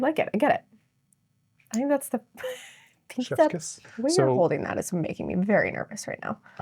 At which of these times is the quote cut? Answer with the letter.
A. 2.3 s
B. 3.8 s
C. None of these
B